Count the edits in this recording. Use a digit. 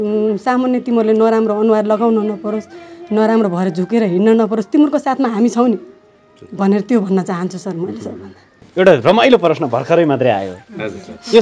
1